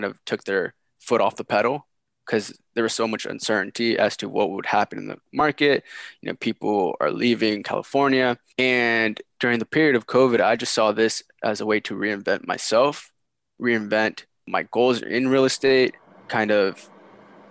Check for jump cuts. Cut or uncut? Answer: uncut